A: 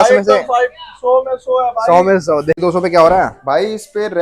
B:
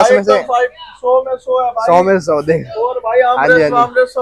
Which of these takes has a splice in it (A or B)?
A